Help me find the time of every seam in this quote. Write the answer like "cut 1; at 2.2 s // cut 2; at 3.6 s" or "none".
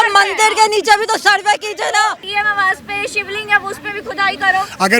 cut 1; at 2.2 s